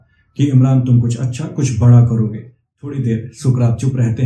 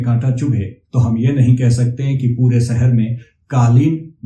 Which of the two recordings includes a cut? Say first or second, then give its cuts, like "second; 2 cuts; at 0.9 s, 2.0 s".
first; 1 cut; at 2.7 s